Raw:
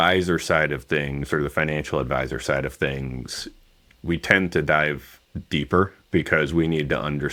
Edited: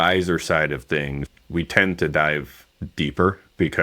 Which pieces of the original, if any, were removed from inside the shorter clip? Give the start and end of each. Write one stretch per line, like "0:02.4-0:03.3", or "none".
0:01.2-0:03.7